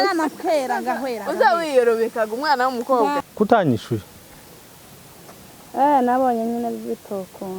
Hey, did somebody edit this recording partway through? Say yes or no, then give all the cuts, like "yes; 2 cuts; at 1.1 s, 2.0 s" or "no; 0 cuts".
yes; 1 cut; at 3.3 s